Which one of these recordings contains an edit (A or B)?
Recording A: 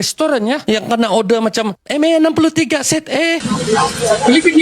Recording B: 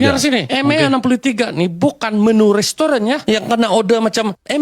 A